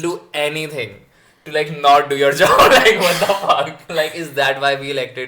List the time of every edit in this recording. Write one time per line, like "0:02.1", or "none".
0:03.8

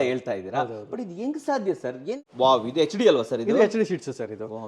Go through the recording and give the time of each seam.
0:02.1

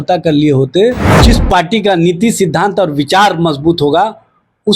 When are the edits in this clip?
0:01.1

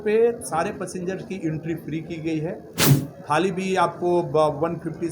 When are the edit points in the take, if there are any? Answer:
0:02.9

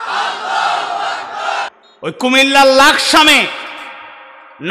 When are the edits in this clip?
0:01.7

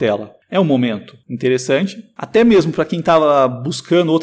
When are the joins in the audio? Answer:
none

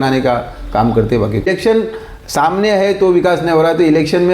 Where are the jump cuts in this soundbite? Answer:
0:01.5

